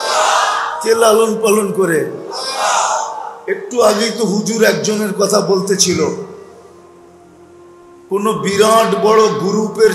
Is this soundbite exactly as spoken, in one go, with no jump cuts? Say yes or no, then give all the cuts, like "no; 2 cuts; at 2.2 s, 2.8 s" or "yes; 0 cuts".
no; 2 cuts; at 6.5 s, 7.8 s